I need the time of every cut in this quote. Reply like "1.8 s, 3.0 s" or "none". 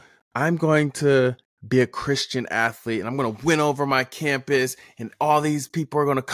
1.5 s